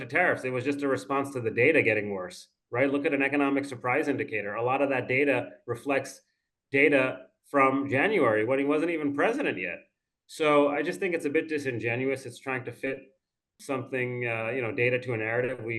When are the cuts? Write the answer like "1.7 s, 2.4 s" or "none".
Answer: 13.5 s